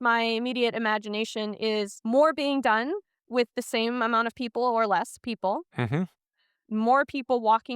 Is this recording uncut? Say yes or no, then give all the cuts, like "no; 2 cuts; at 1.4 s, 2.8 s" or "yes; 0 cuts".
no; 1 cut; at 1.9 s